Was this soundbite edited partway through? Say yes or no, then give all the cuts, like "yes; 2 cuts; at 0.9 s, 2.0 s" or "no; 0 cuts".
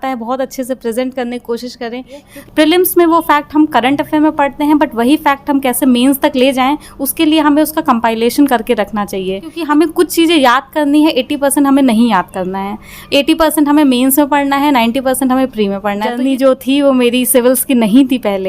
yes; 3 cuts; at 2.3 s, 9.5 s, 16.2 s